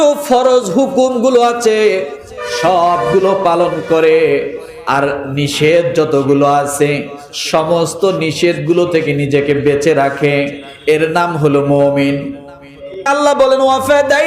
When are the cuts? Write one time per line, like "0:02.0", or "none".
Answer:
0:13.1